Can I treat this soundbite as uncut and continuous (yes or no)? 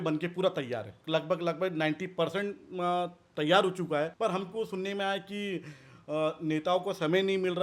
no